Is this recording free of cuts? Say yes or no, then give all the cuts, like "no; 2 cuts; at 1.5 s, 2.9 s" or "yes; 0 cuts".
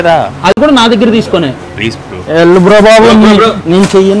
yes; 0 cuts